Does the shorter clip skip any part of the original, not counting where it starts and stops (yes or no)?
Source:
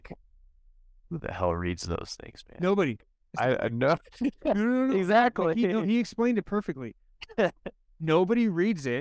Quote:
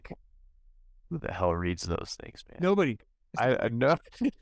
no